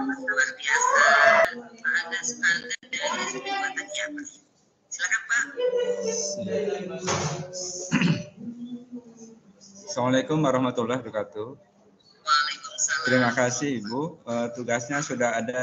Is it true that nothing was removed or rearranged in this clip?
no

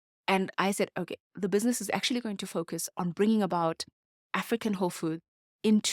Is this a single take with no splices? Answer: yes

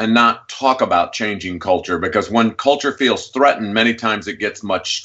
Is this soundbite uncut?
yes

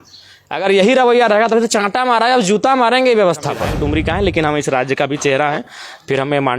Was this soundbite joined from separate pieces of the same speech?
yes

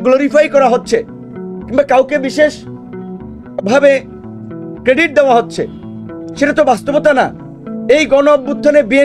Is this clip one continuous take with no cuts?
yes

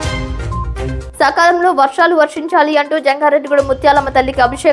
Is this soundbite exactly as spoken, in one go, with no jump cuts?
yes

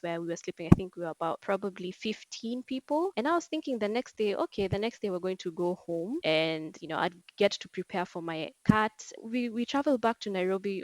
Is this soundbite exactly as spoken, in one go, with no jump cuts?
no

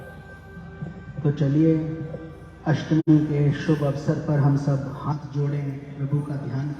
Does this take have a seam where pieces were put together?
yes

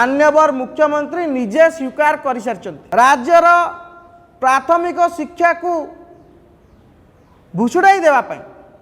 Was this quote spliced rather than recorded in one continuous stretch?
yes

